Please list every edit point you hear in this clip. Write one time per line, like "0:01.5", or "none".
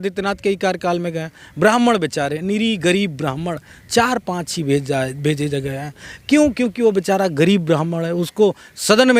none